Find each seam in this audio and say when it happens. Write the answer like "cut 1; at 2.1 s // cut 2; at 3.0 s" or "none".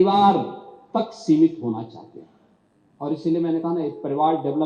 none